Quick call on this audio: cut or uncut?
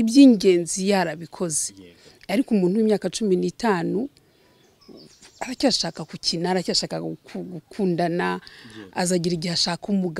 uncut